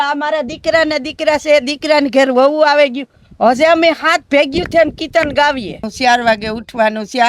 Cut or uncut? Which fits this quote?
cut